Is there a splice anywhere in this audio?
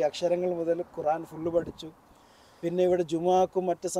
no; 0 cuts

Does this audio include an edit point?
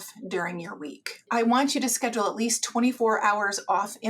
yes; 2 cuts; at 1.3 s, 3.0 s

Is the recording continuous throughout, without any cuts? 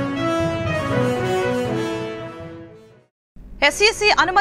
no; 1 cut; at 1.9 s

